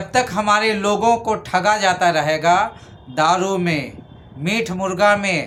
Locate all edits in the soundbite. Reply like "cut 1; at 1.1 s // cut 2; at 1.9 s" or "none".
none